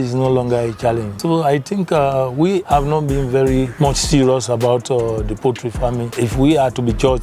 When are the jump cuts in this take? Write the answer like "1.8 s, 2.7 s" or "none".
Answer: 1.1 s, 2.6 s, 3.7 s, 6.1 s

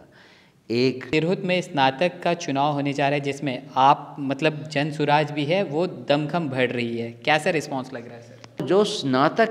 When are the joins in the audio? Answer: 1.0 s, 8.6 s

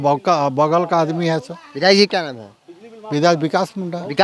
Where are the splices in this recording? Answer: none

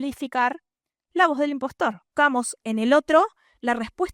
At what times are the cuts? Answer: 2.0 s

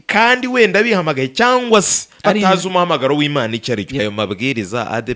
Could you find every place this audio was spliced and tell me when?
4.0 s

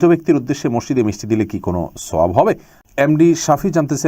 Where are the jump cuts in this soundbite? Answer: 2.7 s

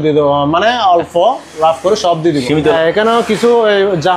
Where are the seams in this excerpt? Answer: 2.7 s

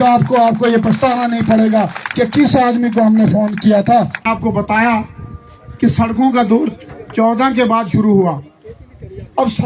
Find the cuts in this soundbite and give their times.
4.2 s

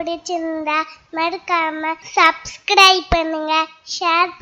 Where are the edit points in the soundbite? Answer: 2.0 s

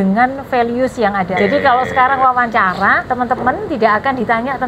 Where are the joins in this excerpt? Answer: 1.3 s, 3.0 s

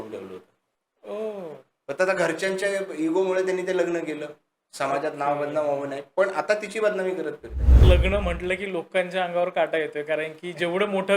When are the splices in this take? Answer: 7.8 s

